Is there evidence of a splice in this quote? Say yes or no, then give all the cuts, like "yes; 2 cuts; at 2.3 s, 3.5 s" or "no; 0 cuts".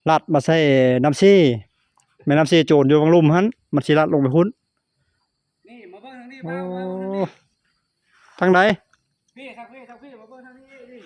no; 0 cuts